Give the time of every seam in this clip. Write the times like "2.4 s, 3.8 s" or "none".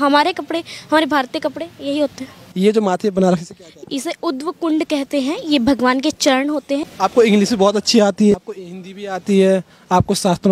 2.4 s, 6.9 s, 8.3 s